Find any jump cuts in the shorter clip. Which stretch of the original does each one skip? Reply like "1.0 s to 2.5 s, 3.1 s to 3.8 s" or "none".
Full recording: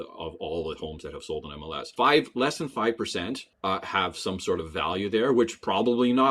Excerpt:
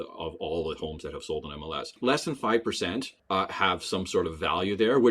1.9 s to 2.3 s